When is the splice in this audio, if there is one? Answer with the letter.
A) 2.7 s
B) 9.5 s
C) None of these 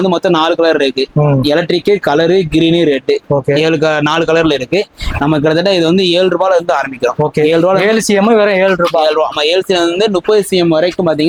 C